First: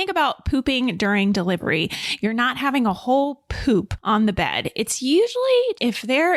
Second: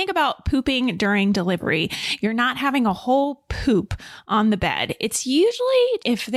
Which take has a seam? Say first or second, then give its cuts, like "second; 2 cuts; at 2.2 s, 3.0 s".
first; 1 cut; at 3.9 s